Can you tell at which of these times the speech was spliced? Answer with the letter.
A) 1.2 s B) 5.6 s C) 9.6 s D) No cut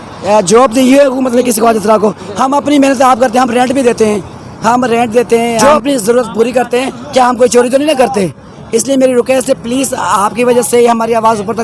B